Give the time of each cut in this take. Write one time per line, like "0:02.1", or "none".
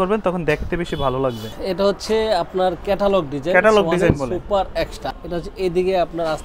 0:01.6
0:05.1